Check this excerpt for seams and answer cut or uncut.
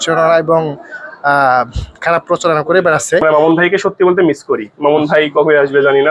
cut